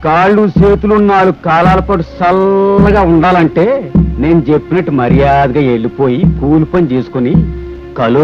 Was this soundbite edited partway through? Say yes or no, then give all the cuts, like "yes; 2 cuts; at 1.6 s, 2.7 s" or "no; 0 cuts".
no; 0 cuts